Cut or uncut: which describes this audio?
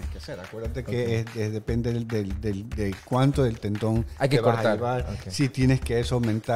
uncut